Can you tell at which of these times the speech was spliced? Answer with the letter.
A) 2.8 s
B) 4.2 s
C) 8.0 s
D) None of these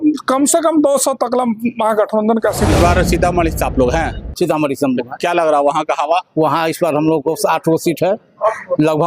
A